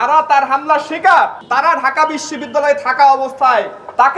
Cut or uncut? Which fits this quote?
cut